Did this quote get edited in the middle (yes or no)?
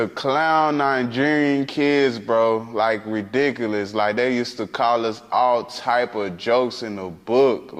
no